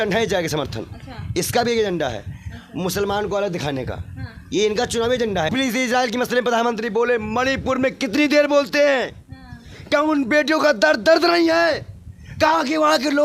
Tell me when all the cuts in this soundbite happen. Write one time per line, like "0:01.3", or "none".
none